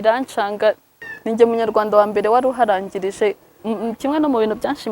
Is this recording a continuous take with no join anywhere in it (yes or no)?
no